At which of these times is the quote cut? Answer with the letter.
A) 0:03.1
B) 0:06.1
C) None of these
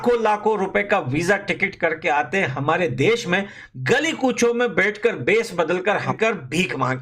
B